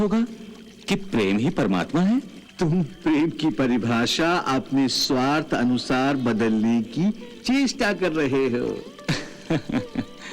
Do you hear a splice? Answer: yes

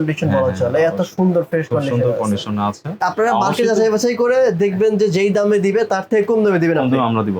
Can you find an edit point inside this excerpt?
yes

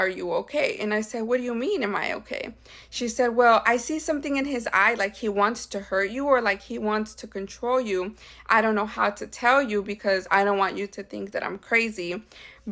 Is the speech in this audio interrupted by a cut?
no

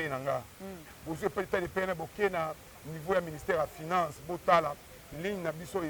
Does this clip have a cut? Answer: yes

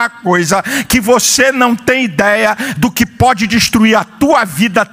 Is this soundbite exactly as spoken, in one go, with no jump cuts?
no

